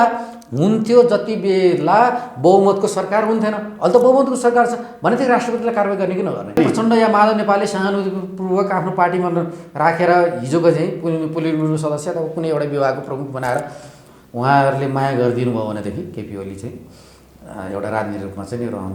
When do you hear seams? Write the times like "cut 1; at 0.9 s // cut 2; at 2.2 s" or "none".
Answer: cut 1; at 6.6 s